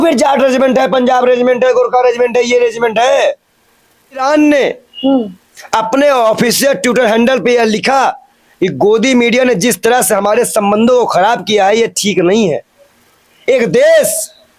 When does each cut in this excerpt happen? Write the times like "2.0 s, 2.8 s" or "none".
4.2 s